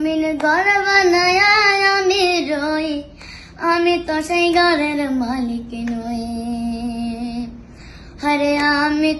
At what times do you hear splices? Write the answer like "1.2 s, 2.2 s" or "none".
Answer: none